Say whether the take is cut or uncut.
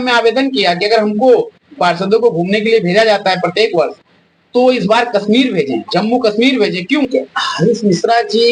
cut